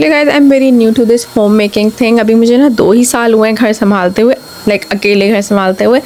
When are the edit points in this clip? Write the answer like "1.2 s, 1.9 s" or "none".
none